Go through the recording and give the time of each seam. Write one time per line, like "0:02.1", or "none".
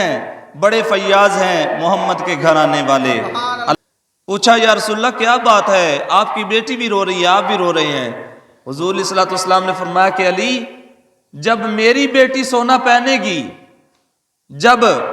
0:03.8